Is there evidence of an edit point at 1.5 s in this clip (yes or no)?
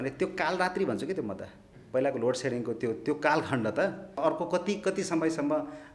no